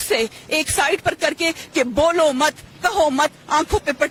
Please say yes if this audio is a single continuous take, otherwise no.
yes